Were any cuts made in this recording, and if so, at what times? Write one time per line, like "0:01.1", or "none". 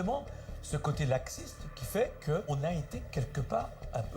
0:02.5